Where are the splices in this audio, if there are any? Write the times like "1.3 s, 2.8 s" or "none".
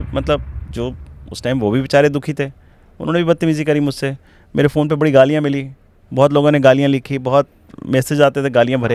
none